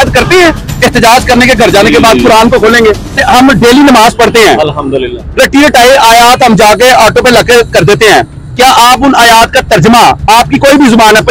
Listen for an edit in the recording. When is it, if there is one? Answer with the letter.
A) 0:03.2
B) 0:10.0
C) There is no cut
A